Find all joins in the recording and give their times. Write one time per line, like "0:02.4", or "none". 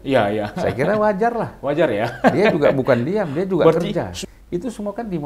0:04.1